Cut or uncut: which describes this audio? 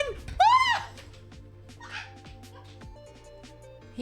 cut